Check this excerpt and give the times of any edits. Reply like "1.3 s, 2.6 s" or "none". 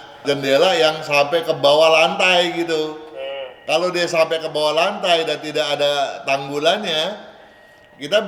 none

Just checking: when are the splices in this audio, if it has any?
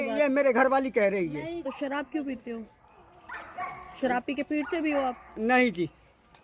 1.6 s

